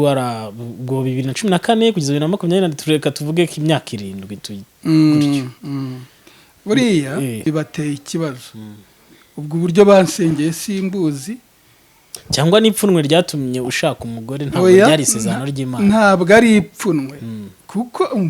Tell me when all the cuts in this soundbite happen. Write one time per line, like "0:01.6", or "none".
0:07.4